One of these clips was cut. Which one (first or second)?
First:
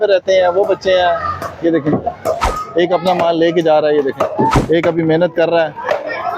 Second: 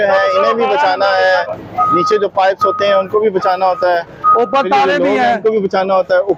first